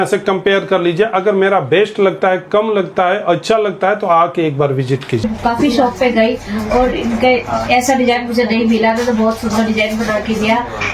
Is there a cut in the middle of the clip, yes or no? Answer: yes